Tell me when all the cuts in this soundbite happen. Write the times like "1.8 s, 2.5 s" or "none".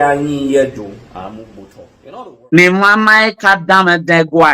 1.9 s